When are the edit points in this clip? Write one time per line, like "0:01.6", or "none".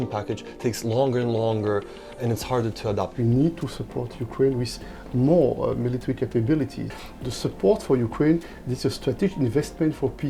0:03.1
0:06.9